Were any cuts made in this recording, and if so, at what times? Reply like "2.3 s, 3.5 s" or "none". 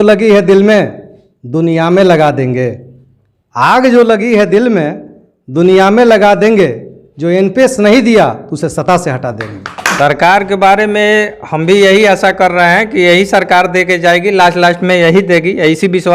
9.8 s

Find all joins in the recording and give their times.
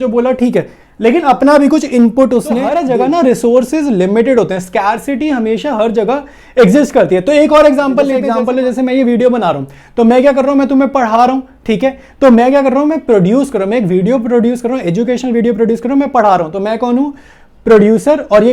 2.7 s, 8.3 s

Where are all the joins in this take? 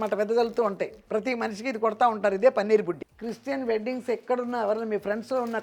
3.1 s

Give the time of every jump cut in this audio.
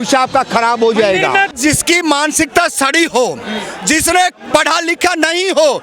1.5 s

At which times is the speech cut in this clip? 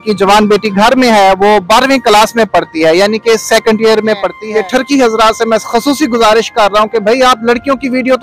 4.3 s

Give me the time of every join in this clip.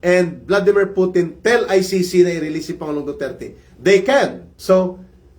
4.5 s

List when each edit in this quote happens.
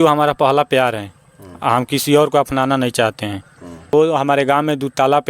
3.9 s

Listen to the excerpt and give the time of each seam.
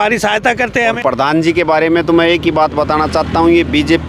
1.0 s

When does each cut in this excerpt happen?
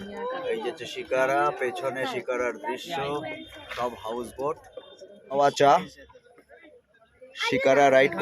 5.3 s

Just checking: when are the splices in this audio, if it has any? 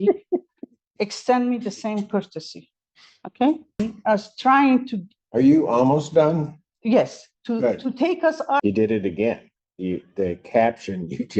3.8 s, 8.6 s

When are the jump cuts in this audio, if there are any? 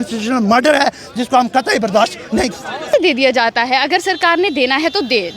3.0 s

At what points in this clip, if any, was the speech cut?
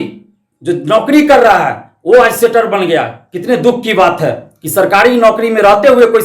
none

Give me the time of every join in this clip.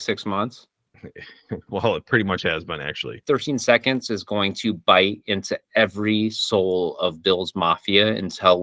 3.2 s

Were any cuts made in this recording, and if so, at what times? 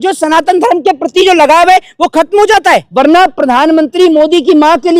2.9 s

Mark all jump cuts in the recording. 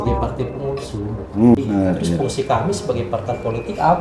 1.5 s

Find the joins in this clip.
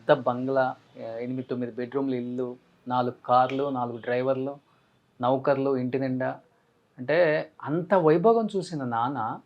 0.9 s

